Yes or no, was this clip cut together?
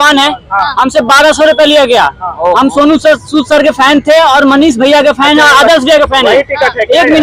no